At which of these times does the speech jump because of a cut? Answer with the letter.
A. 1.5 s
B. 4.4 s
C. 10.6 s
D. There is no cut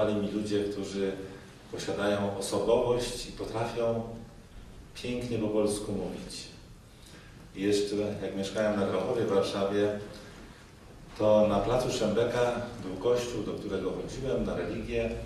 B